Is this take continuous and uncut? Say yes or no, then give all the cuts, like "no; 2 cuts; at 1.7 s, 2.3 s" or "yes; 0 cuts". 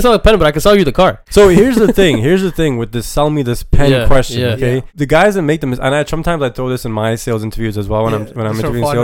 no; 2 cuts; at 1.2 s, 4.9 s